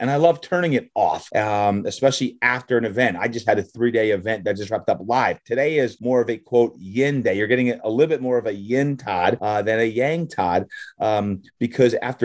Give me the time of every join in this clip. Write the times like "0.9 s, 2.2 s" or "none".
1.2 s, 6.0 s, 9.4 s